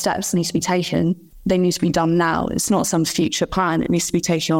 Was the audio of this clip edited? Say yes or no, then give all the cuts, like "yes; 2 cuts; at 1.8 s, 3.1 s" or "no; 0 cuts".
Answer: yes; 1 cut; at 1.3 s